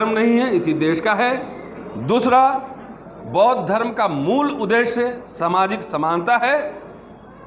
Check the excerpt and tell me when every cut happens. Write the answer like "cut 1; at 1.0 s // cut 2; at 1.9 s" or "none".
none